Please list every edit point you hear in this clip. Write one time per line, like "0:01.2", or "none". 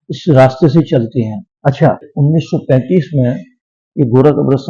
0:02.1